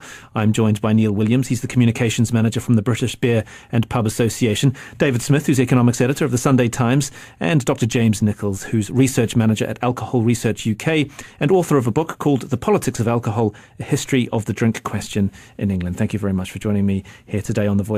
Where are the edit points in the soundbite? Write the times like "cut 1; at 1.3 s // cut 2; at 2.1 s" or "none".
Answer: none